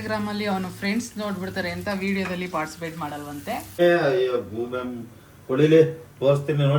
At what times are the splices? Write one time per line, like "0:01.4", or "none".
0:03.8